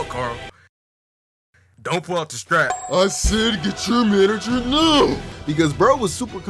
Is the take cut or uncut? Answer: cut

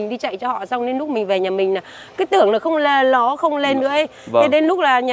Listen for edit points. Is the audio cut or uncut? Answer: uncut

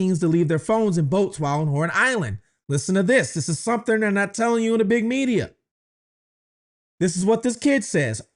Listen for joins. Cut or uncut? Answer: uncut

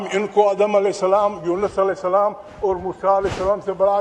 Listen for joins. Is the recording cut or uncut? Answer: uncut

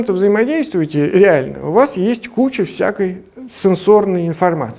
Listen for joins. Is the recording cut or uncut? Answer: uncut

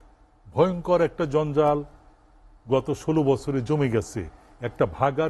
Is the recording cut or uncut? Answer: uncut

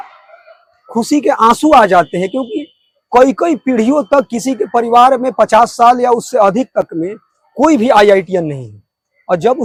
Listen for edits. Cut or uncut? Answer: uncut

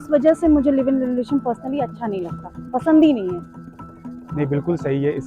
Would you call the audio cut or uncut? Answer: uncut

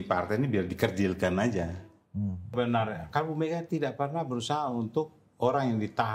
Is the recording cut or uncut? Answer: cut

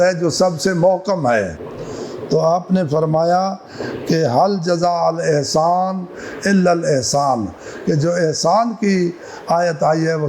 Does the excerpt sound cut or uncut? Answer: uncut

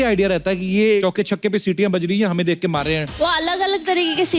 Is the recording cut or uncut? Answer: cut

